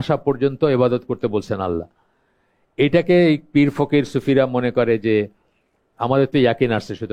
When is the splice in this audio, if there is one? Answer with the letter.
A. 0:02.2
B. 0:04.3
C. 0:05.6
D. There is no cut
D